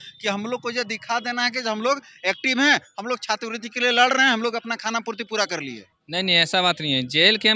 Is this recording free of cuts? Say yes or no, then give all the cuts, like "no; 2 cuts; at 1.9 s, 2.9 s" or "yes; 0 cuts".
yes; 0 cuts